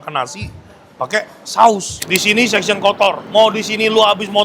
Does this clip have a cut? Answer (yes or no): yes